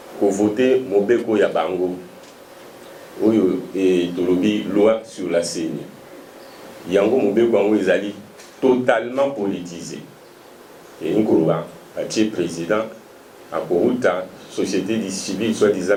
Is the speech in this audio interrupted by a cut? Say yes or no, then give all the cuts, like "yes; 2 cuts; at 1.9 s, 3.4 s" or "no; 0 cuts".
no; 0 cuts